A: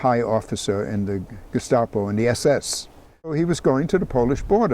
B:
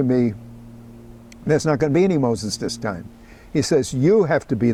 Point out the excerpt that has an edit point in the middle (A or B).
A